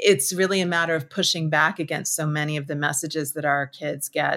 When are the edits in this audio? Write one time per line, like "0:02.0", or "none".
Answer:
none